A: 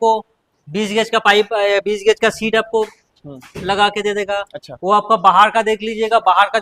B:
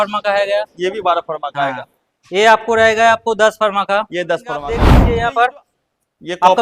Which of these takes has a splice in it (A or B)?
B